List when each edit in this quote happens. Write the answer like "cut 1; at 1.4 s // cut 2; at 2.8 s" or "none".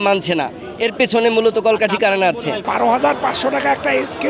cut 1; at 2.6 s